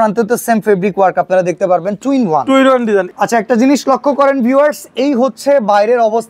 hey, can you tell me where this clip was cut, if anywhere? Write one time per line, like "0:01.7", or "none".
0:03.1